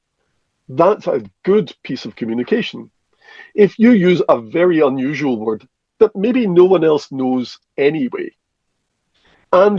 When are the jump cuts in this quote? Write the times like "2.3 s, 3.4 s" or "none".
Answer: none